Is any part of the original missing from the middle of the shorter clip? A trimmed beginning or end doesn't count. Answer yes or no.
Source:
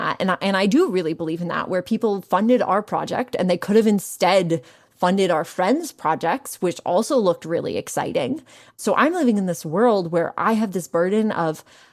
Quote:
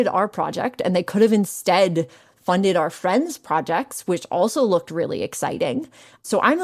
no